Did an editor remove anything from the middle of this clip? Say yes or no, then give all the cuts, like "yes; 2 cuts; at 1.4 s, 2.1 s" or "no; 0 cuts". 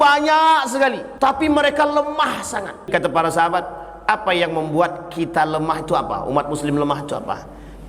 yes; 2 cuts; at 1.1 s, 2.9 s